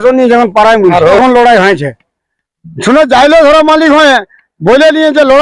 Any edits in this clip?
yes; 1 cut; at 1.2 s

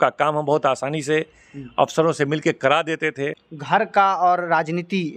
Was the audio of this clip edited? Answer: yes; 1 cut; at 3.5 s

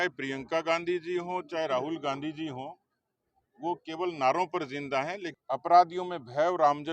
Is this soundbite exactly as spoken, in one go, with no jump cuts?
no; 1 cut; at 5.3 s

